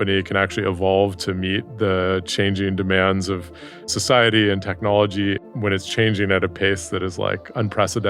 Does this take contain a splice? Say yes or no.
yes